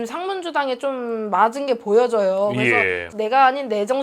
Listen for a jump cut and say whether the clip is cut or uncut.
cut